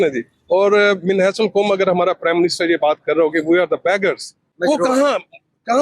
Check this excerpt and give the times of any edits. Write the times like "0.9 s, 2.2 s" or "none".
4.5 s